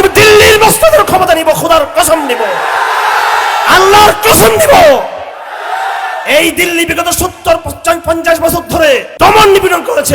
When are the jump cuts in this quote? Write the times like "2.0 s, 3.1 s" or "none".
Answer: 9.1 s